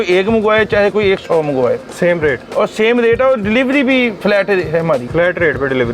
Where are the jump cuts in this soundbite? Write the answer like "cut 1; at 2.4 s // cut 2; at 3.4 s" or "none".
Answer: cut 1; at 4.2 s // cut 2; at 5.1 s